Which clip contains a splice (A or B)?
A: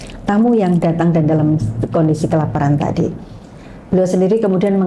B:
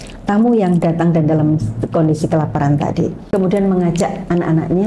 B